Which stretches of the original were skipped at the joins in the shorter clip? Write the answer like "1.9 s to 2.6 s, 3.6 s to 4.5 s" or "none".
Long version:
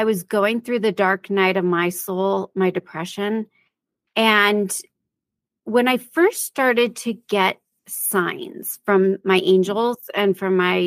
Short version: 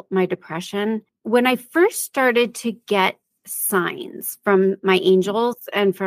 3.6 s to 5.5 s